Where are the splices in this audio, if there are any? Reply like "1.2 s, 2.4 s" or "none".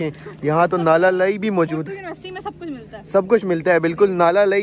none